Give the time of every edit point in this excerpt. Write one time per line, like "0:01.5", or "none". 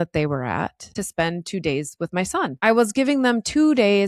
0:00.9
0:02.5